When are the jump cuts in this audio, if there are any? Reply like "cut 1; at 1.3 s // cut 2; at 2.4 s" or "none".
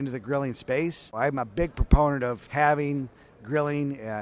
cut 1; at 1.1 s // cut 2; at 2.4 s